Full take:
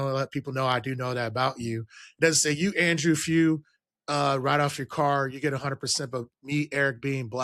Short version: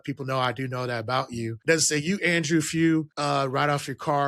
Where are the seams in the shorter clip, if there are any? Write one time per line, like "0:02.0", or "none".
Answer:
0:01.5
0:03.1